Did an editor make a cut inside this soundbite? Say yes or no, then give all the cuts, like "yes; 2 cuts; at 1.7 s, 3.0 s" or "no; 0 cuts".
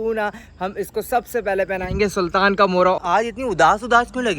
yes; 1 cut; at 3.0 s